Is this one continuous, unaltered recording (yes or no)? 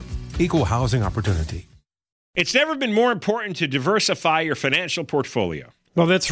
no